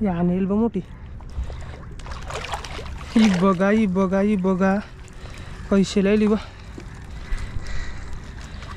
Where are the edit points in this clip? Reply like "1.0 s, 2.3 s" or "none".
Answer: none